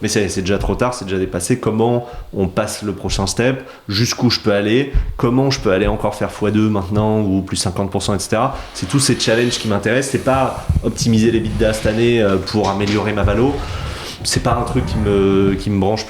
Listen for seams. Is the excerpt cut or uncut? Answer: uncut